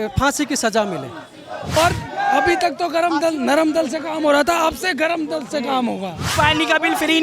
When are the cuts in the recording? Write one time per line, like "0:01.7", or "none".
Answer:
0:01.5
0:06.3